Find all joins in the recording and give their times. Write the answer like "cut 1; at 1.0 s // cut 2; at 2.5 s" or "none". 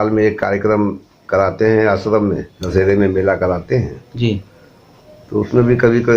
cut 1; at 2.6 s